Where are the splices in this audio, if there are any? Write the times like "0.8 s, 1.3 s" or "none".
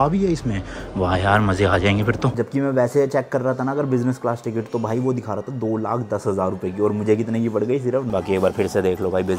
2.3 s, 8.1 s